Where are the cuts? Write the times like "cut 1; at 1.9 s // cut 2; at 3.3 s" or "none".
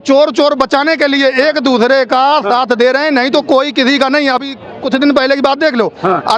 none